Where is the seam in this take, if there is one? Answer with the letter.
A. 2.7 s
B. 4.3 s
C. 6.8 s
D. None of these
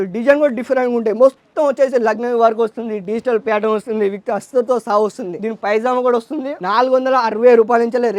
D